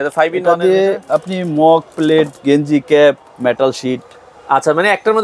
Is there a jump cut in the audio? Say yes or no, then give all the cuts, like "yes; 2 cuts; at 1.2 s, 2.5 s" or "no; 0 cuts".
no; 0 cuts